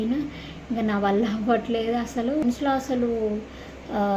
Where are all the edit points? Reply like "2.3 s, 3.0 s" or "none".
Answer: 2.4 s